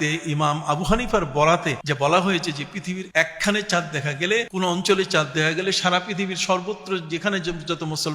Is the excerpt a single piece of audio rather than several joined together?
no; 3 cuts; at 1.8 s, 3.0 s, 4.5 s

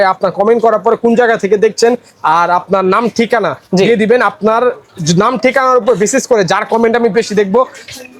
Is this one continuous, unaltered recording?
yes; 0 cuts

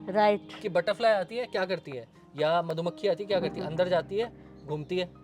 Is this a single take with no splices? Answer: yes; 0 cuts

